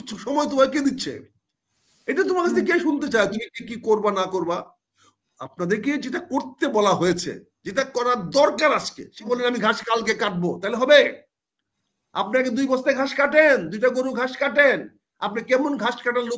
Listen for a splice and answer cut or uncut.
cut